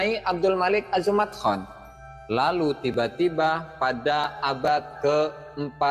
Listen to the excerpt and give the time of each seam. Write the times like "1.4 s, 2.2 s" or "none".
none